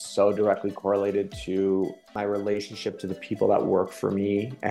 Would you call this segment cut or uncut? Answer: cut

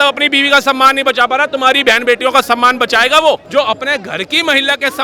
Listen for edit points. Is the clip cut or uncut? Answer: cut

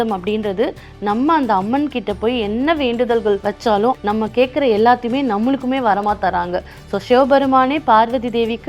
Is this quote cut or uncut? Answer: cut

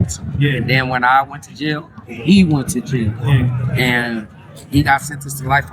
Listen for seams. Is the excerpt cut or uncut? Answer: uncut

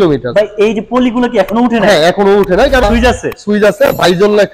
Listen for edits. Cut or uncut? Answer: cut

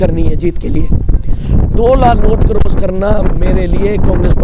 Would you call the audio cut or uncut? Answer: uncut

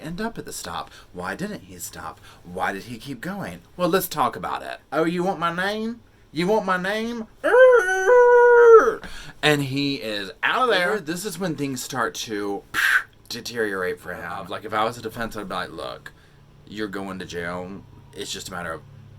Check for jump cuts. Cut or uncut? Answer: cut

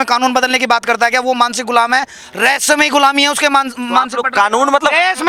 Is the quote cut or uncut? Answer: uncut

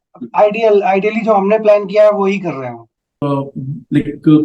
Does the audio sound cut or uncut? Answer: cut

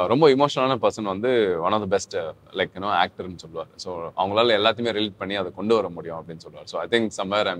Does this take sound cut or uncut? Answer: uncut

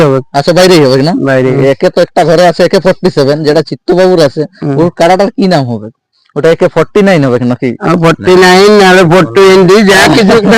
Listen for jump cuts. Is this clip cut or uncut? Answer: cut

